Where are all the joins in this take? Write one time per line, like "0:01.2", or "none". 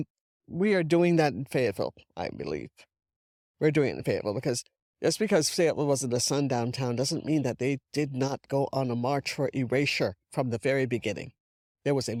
none